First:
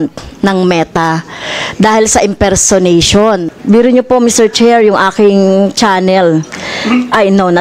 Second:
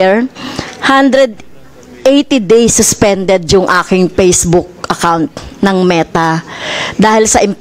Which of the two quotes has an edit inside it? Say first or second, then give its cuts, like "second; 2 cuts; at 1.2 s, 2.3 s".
first; 1 cut; at 3.5 s